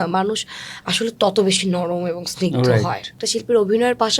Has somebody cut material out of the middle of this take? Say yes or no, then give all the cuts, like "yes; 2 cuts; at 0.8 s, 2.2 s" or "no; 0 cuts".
yes; 1 cut; at 3.2 s